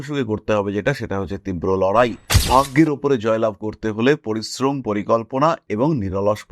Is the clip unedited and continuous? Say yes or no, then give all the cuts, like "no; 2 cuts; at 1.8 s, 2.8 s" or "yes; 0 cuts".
no; 1 cut; at 2.3 s